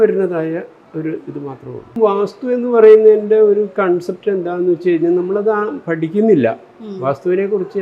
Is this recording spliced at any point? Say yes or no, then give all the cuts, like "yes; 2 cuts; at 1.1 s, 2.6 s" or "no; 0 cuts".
yes; 1 cut; at 1.9 s